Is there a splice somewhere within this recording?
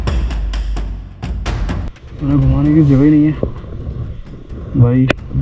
yes; 1 cut; at 2.0 s

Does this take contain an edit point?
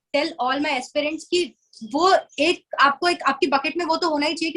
no; 0 cuts

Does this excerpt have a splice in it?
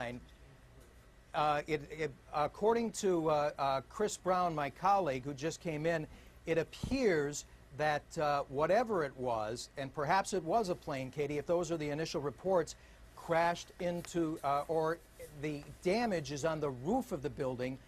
yes; 1 cut; at 16.3 s

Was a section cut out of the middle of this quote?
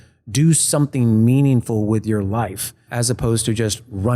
yes; 1 cut; at 2.9 s

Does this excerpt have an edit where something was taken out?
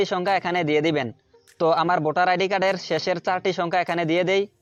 no; 0 cuts

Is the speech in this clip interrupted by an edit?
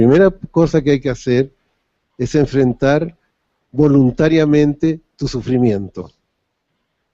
yes; 1 cut; at 5.4 s

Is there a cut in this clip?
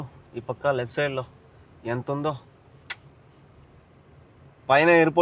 no; 0 cuts

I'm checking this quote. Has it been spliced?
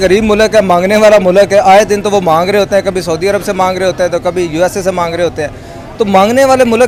no; 0 cuts

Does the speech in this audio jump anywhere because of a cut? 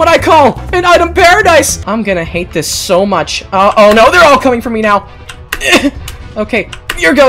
yes; 1 cut; at 1.8 s

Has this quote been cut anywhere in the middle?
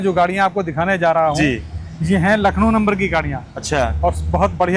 no; 0 cuts

